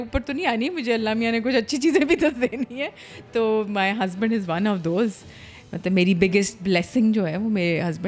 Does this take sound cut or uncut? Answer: uncut